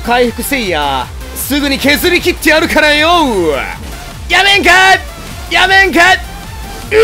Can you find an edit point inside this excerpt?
no; 0 cuts

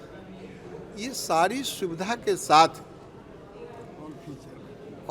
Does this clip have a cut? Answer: no; 0 cuts

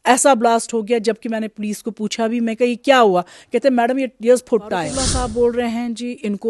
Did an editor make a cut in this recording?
yes; 1 cut; at 5.0 s

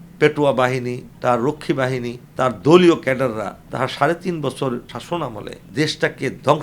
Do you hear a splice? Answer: yes; 4 cuts; at 1.0 s, 2.2 s, 3.6 s, 5.2 s

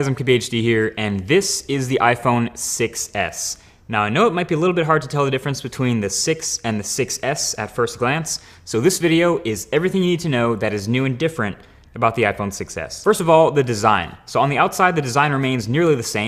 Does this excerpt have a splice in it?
yes; 1 cut; at 12.2 s

